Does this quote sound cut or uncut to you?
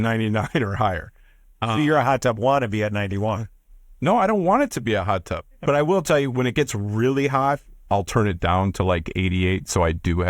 cut